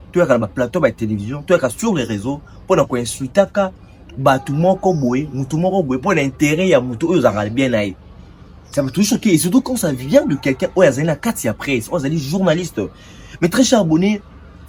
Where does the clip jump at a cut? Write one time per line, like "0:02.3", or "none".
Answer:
none

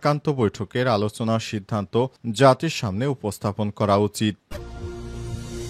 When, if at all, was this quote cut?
0:04.4

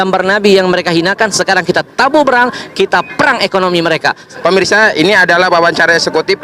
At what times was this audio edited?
0:04.3

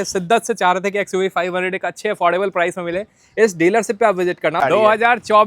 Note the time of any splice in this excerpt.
0:04.6

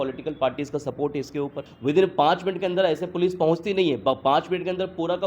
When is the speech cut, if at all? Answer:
0:01.7

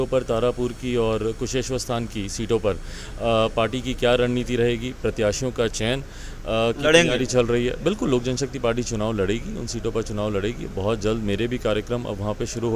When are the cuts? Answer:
none

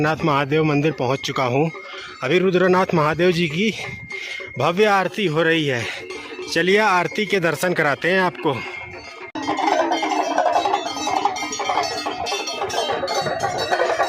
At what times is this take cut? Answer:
0:09.4

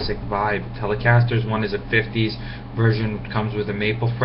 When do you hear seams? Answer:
none

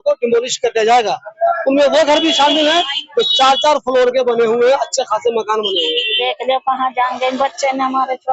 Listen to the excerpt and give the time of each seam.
0:06.1

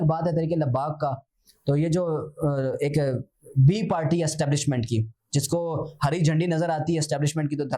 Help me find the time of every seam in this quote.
none

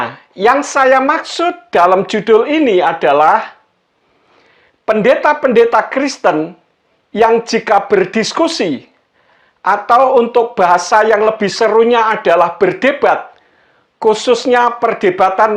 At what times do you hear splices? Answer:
none

